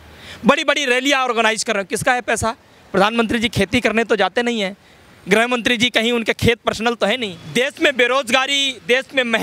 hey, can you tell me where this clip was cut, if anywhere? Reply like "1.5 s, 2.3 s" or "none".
7.4 s